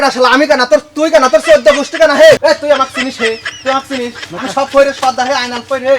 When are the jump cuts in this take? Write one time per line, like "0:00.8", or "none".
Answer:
0:02.4